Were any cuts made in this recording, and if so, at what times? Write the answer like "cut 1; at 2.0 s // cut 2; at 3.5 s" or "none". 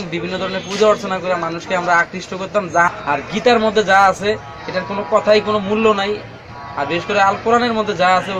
cut 1; at 2.9 s

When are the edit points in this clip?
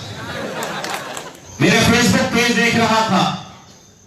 cut 1; at 1.4 s

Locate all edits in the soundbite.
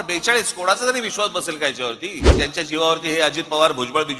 cut 1; at 2.3 s

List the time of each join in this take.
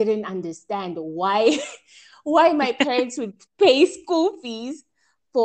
none

